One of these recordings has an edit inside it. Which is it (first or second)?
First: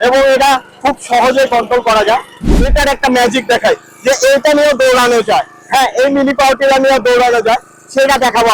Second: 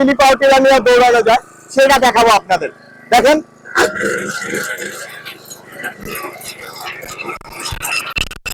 first